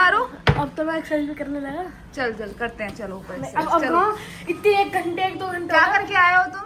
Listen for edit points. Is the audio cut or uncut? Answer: uncut